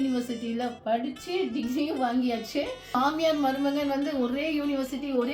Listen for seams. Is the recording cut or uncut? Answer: cut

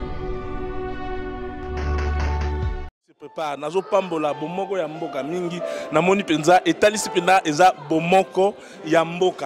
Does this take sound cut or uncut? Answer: uncut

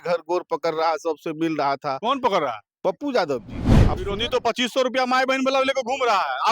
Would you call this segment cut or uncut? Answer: cut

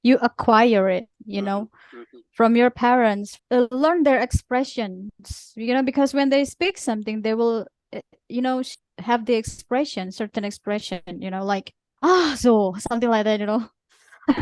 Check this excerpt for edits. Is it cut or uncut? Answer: cut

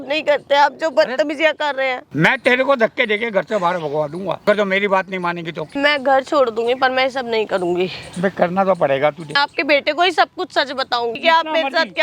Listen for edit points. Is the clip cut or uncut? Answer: cut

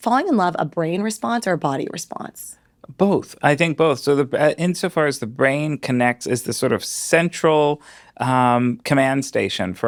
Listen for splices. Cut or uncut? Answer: uncut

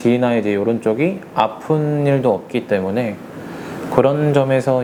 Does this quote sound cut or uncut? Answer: uncut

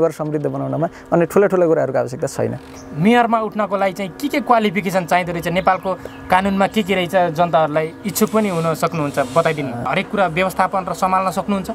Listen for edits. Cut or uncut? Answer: cut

